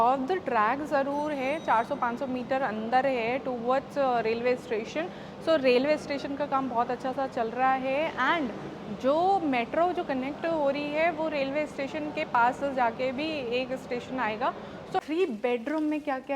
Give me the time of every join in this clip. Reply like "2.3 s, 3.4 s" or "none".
15.0 s